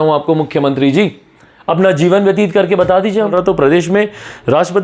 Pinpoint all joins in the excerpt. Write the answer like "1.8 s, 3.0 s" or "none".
3.3 s